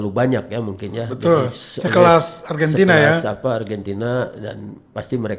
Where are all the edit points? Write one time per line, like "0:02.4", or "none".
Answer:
none